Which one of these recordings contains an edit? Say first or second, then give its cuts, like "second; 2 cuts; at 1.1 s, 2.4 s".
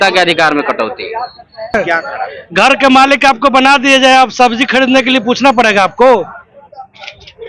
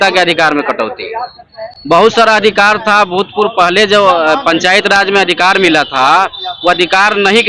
first; 1 cut; at 1.8 s